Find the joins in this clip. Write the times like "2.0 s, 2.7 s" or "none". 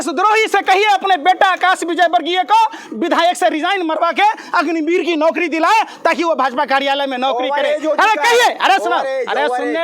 none